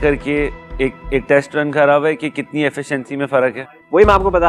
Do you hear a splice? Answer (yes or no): no